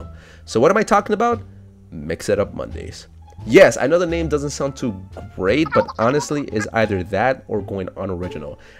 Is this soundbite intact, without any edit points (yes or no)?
yes